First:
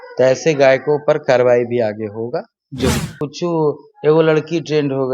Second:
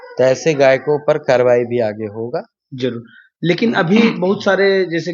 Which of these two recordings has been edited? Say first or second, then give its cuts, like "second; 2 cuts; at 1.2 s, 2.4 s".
first; 1 cut; at 3.2 s